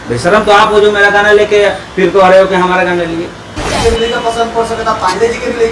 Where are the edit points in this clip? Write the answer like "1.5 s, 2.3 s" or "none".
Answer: 3.6 s